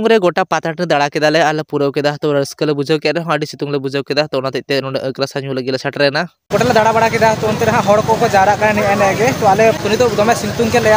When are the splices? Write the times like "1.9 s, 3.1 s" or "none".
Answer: none